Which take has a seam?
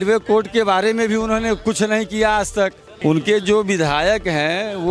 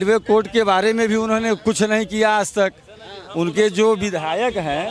first; 1 cut; at 2.9 s

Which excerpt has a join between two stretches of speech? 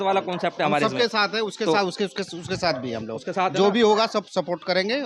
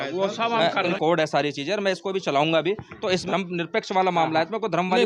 second; 2 cuts; at 0.9 s, 3.2 s

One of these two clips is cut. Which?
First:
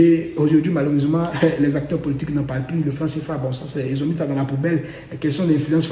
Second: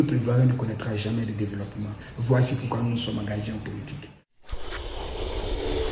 second; 1 cut; at 4.4 s

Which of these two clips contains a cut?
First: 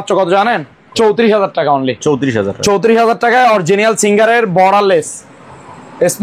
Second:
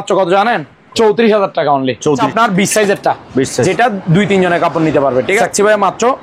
second; 2 cuts; at 2.2 s, 5.4 s

